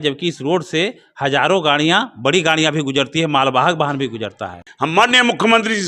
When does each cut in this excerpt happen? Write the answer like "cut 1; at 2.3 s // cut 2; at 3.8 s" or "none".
cut 1; at 4.7 s